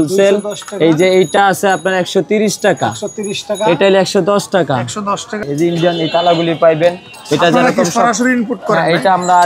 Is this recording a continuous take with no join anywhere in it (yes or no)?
no